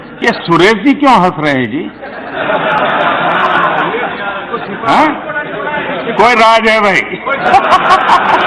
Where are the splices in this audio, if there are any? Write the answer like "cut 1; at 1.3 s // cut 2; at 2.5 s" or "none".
none

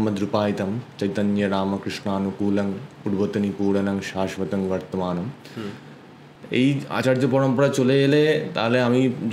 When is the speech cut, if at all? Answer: none

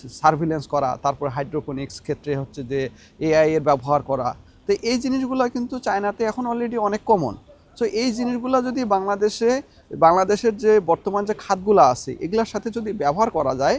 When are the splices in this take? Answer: none

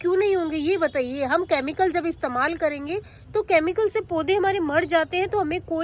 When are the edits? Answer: none

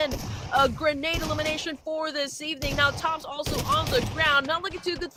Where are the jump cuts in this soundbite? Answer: none

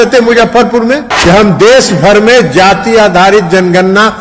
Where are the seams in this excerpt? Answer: cut 1; at 1.1 s

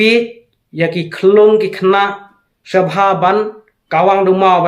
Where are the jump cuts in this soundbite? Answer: none

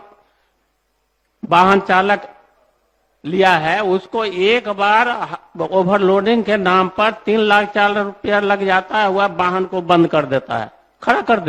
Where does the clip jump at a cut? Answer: none

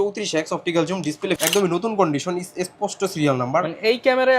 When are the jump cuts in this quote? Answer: cut 1; at 1.4 s

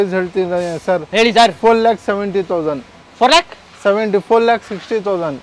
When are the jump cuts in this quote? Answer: none

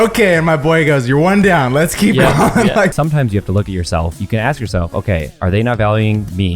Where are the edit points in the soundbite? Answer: cut 1; at 2.9 s // cut 2; at 4.2 s

